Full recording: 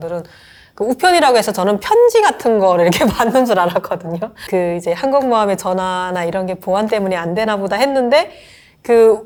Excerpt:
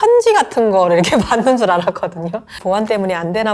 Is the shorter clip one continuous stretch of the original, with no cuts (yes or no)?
no